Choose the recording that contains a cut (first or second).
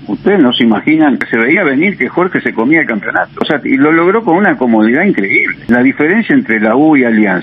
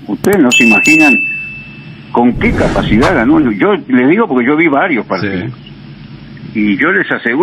first